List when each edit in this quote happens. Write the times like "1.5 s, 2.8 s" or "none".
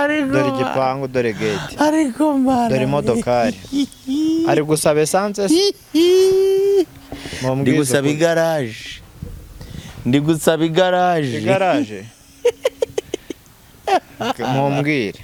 none